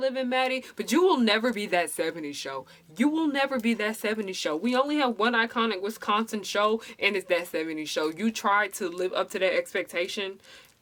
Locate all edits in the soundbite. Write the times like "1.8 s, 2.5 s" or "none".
none

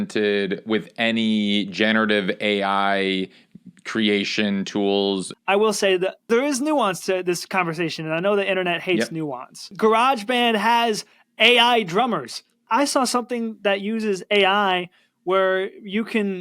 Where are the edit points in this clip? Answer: 5.3 s, 6.3 s, 9.6 s, 12.7 s

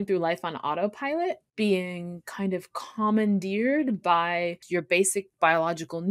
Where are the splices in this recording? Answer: 1.5 s, 4.6 s

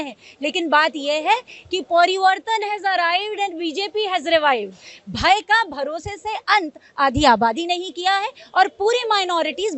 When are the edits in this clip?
none

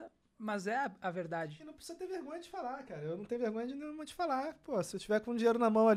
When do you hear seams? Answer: none

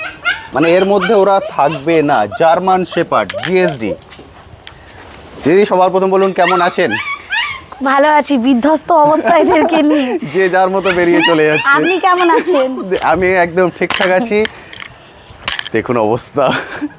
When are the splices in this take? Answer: none

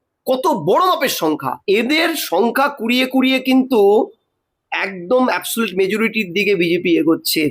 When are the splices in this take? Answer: 1.5 s

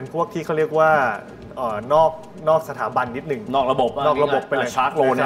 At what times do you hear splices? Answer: none

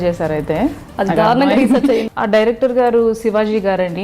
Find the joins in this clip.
2.0 s

